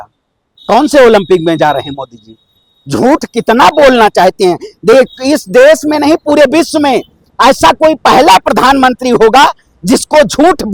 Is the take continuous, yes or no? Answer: yes